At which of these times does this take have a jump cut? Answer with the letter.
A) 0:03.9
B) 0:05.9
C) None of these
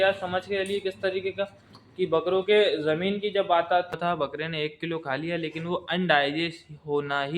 A